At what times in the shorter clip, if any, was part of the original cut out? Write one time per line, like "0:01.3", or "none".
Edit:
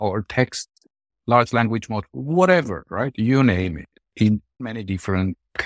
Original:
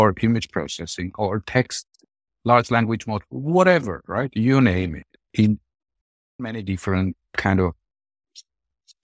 0:04.6